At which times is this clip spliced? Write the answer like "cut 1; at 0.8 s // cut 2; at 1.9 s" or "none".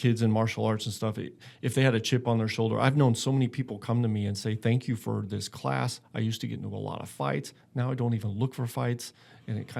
none